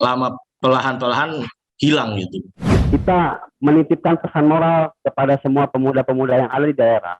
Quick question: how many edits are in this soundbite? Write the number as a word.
one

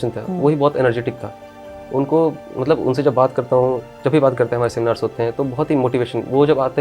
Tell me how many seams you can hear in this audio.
zero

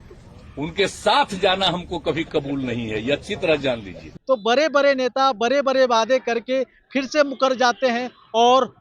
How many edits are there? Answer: one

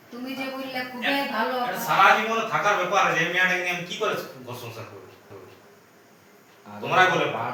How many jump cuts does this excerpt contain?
zero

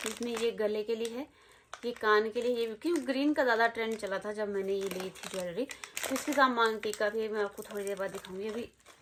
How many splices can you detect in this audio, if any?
zero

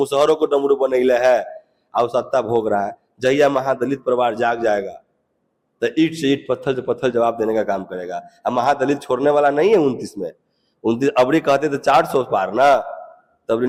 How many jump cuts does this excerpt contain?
zero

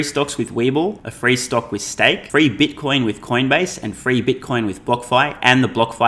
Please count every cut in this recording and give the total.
two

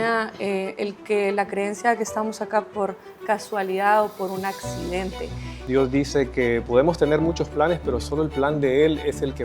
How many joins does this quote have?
one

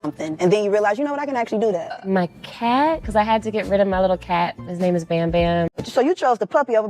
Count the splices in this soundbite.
two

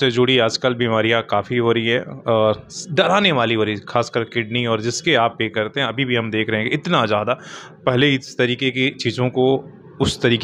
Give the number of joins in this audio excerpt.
zero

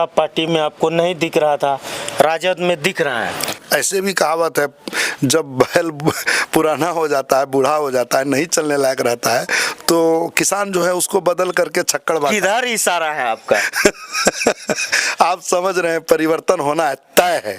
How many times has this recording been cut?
one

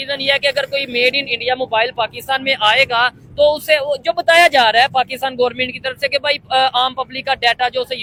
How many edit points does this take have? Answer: zero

